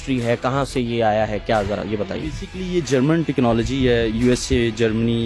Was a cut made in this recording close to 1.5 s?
no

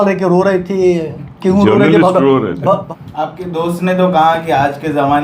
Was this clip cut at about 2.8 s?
yes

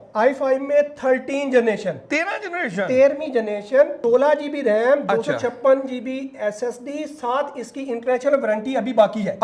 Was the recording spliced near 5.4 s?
no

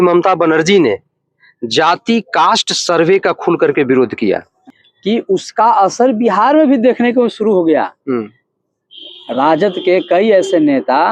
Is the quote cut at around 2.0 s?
no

